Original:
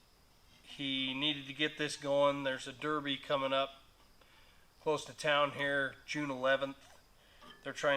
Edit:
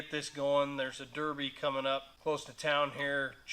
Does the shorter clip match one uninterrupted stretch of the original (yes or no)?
no